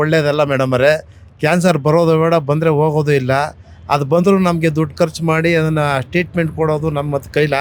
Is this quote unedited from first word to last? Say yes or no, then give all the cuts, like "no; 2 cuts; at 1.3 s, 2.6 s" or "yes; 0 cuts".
yes; 0 cuts